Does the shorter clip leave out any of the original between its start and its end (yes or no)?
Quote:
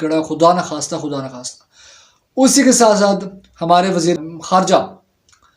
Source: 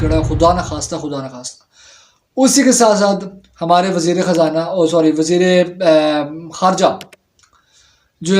yes